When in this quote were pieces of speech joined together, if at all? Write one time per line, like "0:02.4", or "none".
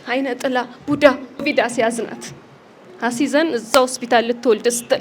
0:01.4